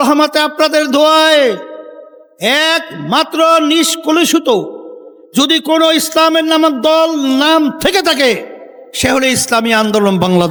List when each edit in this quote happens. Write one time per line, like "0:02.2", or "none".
none